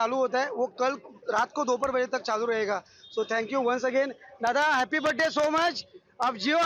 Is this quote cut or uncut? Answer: uncut